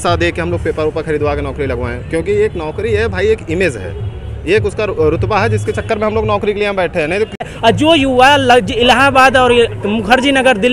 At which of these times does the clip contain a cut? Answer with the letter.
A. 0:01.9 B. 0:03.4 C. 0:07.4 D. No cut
C